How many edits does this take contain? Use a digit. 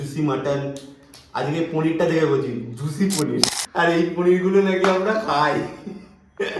1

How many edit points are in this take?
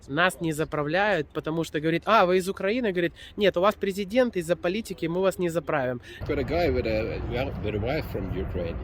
1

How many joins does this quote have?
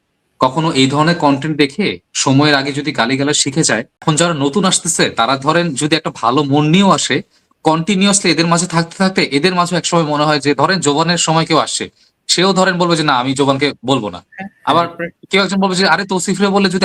1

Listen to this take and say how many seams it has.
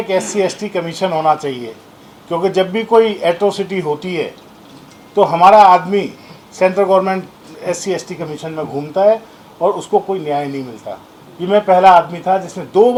0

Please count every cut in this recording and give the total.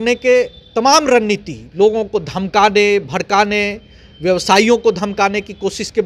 0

